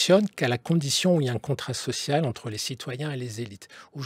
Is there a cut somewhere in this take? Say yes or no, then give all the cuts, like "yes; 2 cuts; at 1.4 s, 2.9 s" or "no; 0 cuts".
yes; 1 cut; at 2.4 s